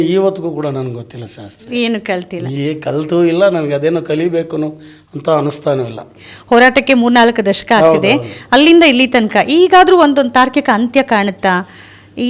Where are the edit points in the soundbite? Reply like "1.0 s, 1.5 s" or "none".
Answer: 6.1 s